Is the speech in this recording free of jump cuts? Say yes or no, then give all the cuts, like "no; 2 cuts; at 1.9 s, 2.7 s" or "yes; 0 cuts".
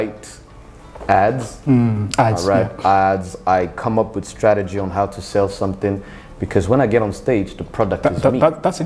yes; 0 cuts